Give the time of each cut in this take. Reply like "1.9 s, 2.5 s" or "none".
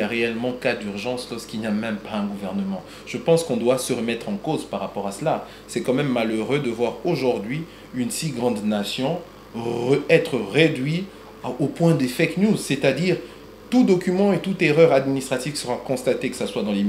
none